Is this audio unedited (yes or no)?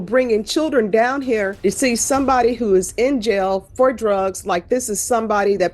no